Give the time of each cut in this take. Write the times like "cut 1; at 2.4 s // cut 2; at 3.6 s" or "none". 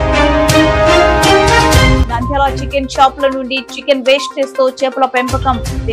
none